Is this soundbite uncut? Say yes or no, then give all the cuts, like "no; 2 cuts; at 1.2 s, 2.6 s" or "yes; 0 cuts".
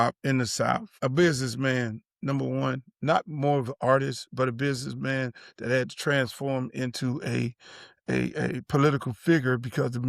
no; 1 cut; at 0.9 s